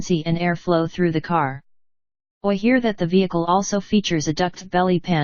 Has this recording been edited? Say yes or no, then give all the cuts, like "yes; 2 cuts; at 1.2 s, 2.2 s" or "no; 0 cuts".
no; 0 cuts